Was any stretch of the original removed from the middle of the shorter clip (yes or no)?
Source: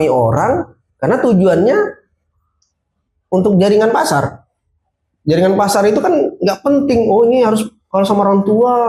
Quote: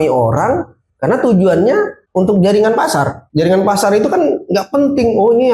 yes